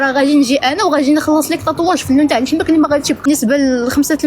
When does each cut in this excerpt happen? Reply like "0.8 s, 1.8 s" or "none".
3.3 s